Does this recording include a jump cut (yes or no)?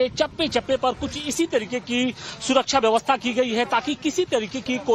yes